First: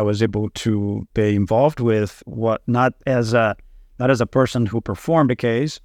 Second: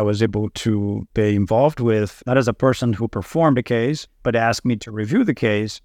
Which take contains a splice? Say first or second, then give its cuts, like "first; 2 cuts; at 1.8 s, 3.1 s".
second; 2 cuts; at 2.2 s, 4.1 s